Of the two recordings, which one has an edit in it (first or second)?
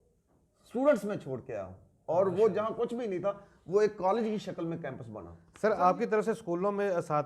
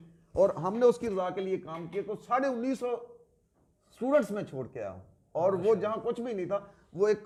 first